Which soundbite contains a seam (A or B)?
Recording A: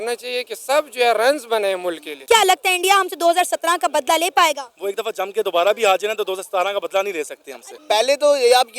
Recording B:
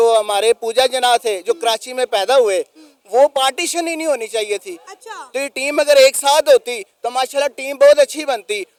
A